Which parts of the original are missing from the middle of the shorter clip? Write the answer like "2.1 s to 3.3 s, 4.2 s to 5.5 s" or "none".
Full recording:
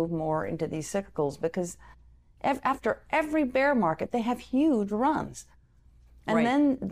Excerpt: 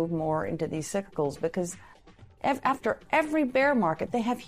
none

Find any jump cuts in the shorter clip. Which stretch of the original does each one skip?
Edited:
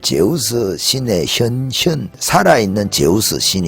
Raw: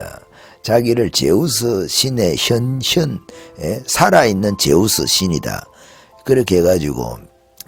3.3 s to 3.9 s

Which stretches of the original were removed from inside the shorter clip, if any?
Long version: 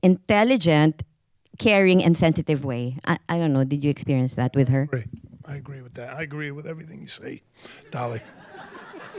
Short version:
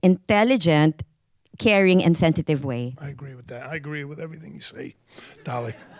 2.9 s to 5.4 s

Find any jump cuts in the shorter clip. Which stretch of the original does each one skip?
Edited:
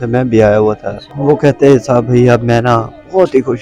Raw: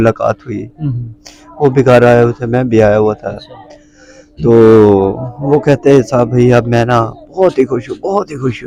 3.5 s to 5.3 s

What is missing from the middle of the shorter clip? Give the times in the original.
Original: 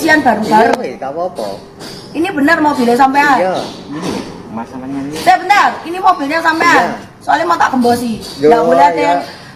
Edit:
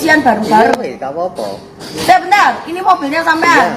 1.9 s to 5.1 s

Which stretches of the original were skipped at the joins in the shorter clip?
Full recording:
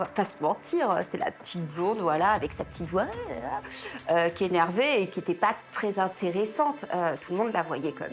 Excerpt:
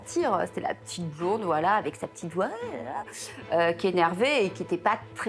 none

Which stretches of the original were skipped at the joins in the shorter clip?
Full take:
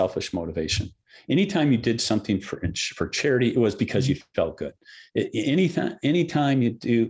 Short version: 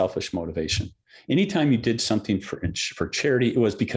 none

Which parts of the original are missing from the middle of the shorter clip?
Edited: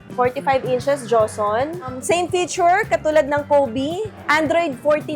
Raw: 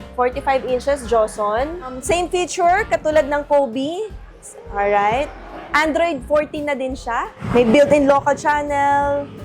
4.1 s to 5.6 s

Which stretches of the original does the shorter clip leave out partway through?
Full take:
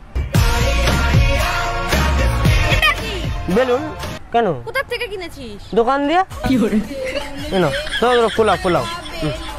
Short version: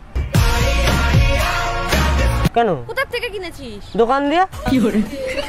2.5 s to 4.3 s

